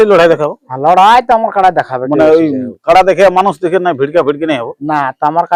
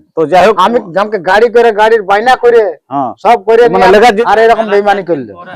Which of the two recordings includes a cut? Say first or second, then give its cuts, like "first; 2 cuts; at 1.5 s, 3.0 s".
second; 1 cut; at 4.2 s